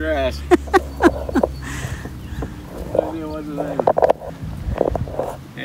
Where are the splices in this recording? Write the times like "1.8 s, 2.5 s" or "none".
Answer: 4.3 s